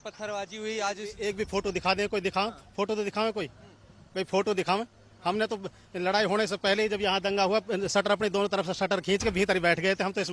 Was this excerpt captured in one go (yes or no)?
yes